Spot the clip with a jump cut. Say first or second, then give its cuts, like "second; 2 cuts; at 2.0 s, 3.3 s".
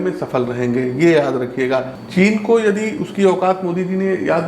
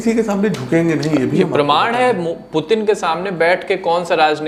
first; 1 cut; at 2.0 s